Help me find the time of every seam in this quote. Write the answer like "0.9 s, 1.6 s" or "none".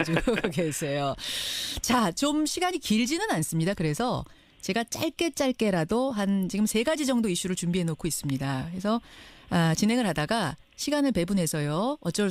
11.1 s